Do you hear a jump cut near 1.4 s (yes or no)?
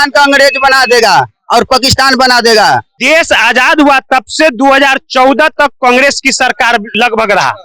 no